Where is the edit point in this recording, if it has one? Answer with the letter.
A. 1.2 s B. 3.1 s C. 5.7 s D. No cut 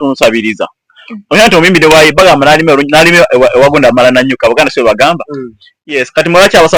D